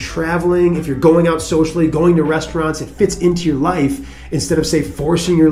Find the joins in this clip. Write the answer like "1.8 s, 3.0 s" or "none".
none

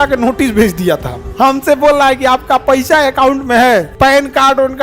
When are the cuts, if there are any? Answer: 1.2 s, 3.9 s

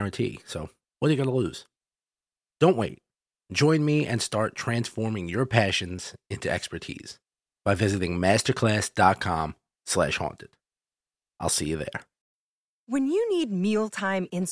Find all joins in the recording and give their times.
12.1 s

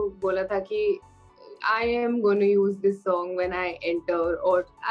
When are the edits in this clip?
none

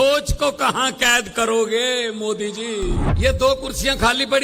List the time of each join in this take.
3.1 s

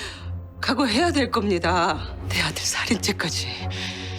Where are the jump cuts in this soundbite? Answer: 2.1 s

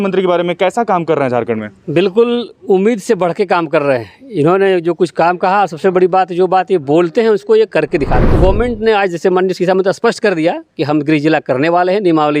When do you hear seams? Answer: 8.2 s

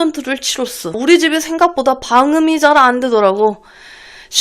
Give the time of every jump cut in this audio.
1.0 s

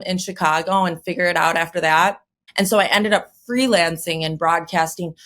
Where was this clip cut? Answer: 2.4 s

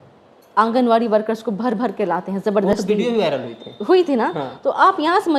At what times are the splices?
none

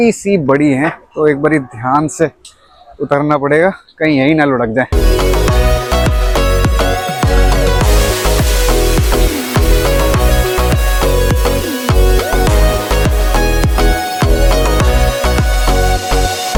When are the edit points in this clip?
none

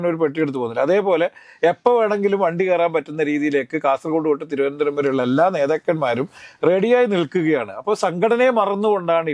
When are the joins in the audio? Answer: none

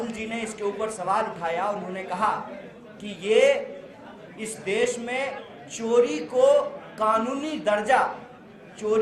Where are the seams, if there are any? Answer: none

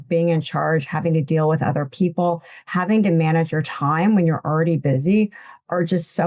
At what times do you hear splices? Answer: none

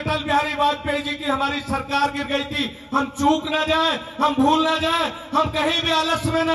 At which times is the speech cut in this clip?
none

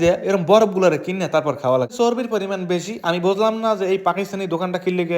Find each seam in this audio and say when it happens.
1.9 s

